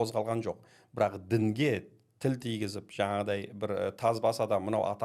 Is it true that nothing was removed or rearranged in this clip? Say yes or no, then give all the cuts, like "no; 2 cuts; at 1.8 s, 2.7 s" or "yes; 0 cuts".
yes; 0 cuts